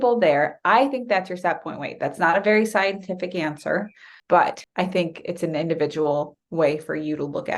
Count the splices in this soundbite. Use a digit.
2